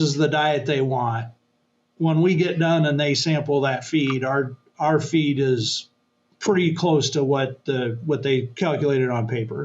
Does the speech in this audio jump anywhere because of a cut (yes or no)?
yes